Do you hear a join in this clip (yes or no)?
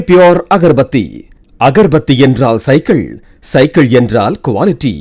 no